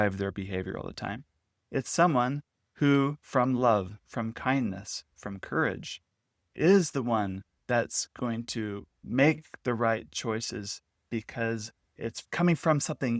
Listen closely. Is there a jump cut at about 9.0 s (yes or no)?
yes